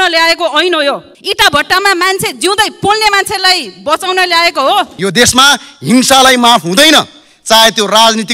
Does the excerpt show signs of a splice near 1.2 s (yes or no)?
yes